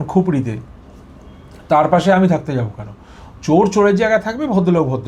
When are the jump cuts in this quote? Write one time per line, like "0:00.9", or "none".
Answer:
none